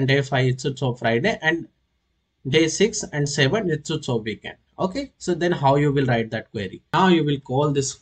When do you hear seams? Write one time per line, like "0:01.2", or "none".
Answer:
0:06.9